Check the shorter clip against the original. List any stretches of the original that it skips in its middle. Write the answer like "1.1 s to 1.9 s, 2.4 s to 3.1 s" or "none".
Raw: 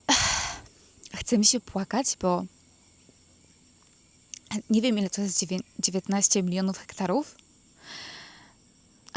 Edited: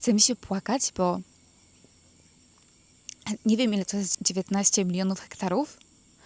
5.4 s to 5.7 s

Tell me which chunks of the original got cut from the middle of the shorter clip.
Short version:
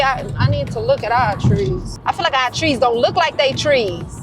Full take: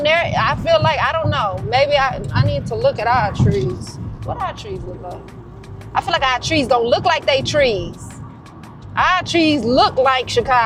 3.9 s to 5.8 s

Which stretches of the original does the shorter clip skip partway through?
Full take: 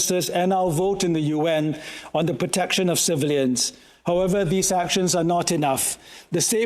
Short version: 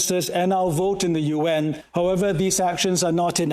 1.8 s to 3.9 s

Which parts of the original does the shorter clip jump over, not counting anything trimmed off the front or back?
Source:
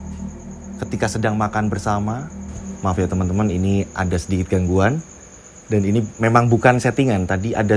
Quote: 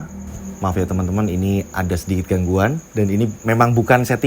5.0 s to 5.6 s

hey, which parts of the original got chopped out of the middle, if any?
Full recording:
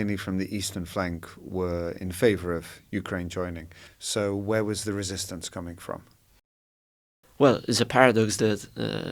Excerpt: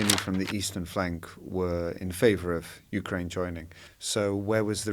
none

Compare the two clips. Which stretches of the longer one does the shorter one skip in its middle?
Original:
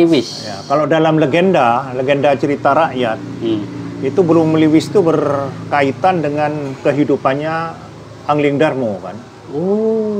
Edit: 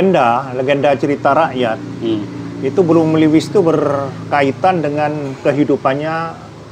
none

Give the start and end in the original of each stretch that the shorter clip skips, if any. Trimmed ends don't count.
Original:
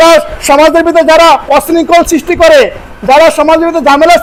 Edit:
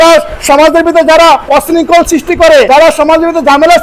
2.7 s to 3.1 s

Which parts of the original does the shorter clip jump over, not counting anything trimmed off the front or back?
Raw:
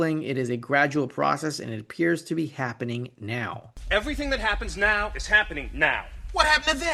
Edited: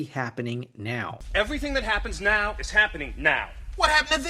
3.6 s to 3.7 s

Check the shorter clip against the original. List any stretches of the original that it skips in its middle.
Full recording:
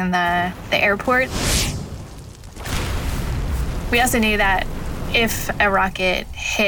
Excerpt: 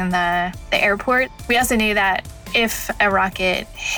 1.4 s to 3.8 s, 4.8 s to 5.0 s

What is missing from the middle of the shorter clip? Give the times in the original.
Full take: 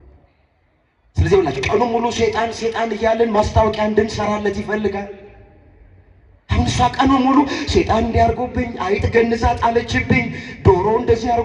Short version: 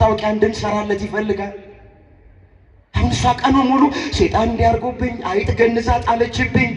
none

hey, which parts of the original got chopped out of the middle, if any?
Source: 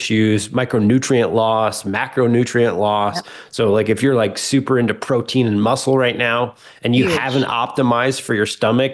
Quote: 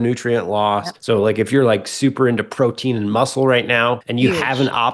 3.2 s to 3.4 s, 6.6 s to 6.8 s

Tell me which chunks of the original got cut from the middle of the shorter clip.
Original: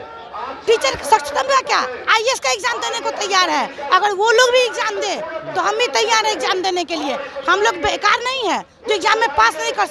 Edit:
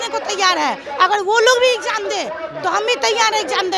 none

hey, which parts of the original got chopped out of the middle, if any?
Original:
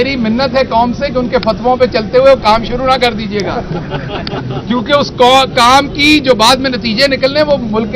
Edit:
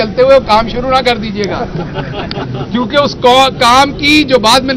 none

